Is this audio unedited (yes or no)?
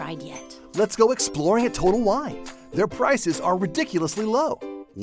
yes